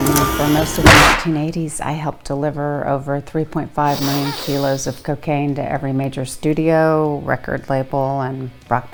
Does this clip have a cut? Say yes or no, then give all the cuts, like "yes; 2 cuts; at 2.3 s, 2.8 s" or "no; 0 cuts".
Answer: no; 0 cuts